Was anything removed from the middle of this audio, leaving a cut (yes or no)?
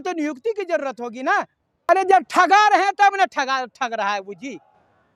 yes